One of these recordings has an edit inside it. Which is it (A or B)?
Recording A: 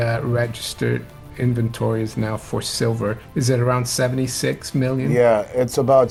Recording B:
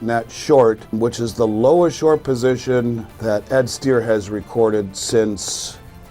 B